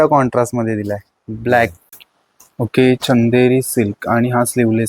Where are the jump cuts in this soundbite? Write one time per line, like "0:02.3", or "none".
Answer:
0:01.9